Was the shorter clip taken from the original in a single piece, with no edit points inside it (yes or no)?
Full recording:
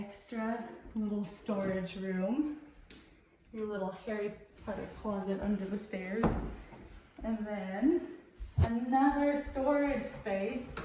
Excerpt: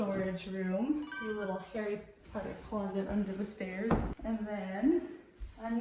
no